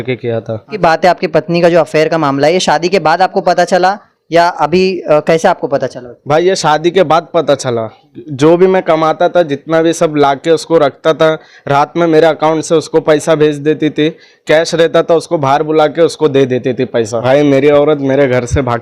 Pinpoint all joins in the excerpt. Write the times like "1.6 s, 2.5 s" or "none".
0.8 s, 17.1 s